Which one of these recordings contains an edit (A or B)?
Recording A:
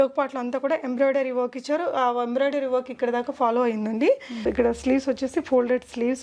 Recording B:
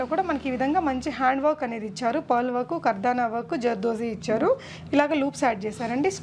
A